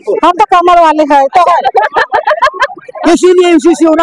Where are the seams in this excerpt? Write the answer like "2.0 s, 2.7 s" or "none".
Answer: 2.9 s